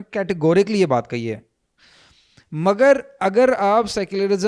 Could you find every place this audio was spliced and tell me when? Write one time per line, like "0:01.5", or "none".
none